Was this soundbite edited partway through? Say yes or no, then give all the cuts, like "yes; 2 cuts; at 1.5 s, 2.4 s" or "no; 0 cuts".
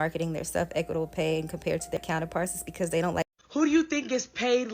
yes; 2 cuts; at 2.0 s, 3.3 s